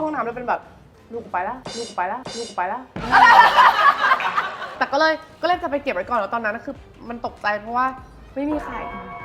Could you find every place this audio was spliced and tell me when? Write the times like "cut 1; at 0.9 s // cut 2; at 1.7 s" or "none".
cut 1; at 4.7 s